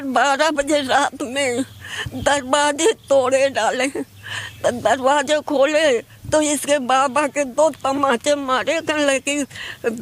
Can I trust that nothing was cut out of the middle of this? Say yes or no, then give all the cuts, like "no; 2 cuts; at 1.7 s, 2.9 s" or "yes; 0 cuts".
yes; 0 cuts